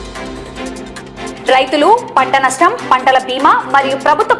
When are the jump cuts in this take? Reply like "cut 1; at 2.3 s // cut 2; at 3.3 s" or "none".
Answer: cut 1; at 1.3 s